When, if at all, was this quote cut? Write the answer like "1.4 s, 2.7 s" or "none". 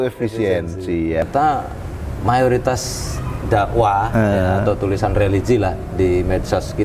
1.2 s